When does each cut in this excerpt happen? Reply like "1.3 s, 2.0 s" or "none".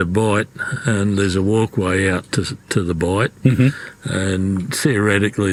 none